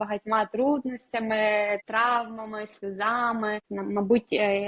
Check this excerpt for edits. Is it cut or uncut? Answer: cut